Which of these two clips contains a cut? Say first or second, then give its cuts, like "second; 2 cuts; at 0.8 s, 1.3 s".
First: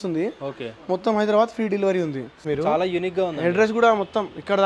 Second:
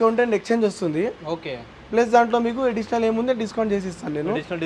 first; 1 cut; at 2.5 s